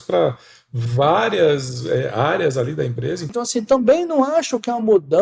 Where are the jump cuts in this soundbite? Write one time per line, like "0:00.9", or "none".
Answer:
0:03.2